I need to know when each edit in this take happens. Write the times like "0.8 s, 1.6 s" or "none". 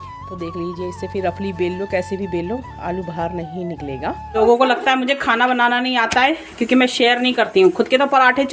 4.4 s